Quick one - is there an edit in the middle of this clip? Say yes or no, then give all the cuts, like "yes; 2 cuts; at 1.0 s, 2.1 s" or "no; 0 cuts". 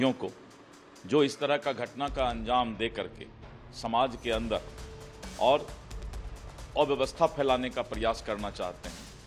no; 0 cuts